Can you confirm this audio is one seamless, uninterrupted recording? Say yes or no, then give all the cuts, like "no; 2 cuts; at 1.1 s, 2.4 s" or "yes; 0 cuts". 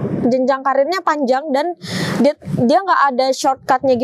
yes; 0 cuts